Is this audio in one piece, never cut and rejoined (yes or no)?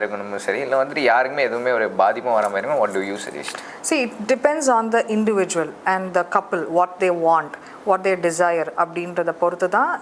yes